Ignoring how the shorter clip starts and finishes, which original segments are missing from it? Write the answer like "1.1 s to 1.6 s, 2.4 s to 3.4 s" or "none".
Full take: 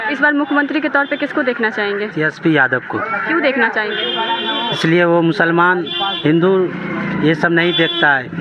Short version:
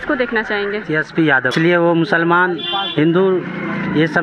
2.8 s to 4.8 s